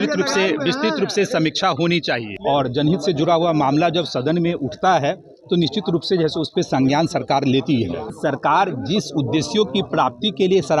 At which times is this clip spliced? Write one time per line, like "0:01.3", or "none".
0:02.3
0:08.1